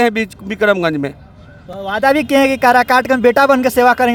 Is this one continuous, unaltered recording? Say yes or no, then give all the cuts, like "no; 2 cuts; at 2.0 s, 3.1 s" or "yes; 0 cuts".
yes; 0 cuts